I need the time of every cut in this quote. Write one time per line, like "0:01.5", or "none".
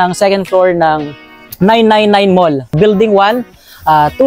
0:02.7